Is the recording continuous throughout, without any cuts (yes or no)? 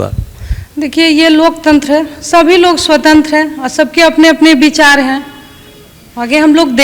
yes